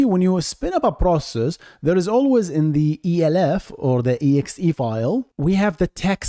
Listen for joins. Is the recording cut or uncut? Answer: uncut